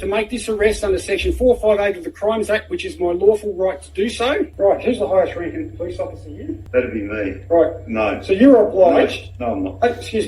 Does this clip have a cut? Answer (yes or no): yes